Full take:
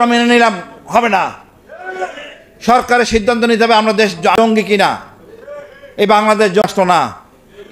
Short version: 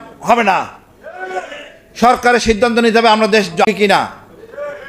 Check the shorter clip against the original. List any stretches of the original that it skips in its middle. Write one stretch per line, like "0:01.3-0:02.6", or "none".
0:04.3-0:04.6